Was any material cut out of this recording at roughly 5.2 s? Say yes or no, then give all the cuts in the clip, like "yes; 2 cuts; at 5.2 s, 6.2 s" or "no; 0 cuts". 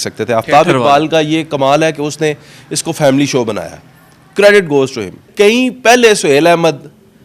yes; 1 cut; at 5.2 s